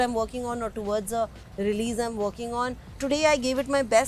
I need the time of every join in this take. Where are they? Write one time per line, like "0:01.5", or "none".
0:03.0